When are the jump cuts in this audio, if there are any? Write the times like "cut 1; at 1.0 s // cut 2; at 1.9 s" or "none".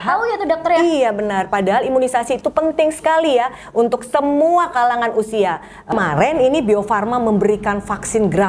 cut 1; at 5.9 s